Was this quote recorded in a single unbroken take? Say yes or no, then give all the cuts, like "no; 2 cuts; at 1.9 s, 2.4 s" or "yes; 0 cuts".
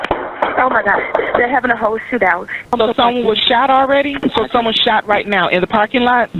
yes; 0 cuts